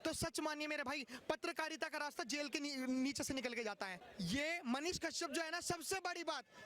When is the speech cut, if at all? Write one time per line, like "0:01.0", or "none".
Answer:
0:03.9